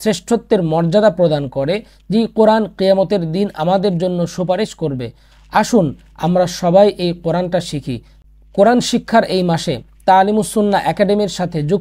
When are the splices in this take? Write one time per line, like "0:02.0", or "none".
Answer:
none